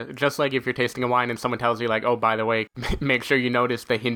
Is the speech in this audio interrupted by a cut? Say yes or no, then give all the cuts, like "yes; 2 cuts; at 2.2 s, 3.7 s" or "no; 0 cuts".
yes; 1 cut; at 2.7 s